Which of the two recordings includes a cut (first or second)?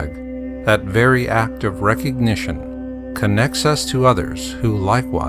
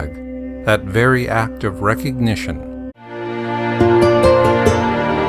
first